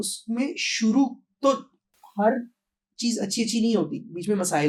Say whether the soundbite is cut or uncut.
uncut